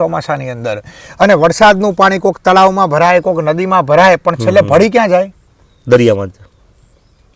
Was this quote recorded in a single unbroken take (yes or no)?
yes